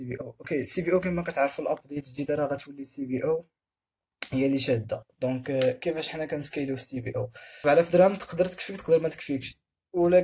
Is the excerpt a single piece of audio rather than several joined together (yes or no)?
no